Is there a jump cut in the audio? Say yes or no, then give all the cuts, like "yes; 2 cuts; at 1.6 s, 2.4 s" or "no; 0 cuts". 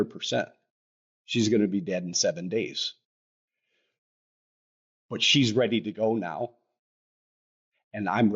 no; 0 cuts